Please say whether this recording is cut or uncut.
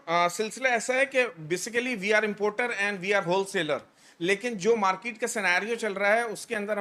uncut